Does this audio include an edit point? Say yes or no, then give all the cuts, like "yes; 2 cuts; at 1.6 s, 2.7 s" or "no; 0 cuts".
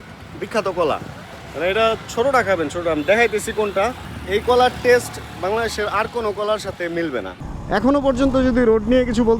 yes; 1 cut; at 7.4 s